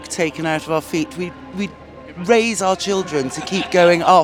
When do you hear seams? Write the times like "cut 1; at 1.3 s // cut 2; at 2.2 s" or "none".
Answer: none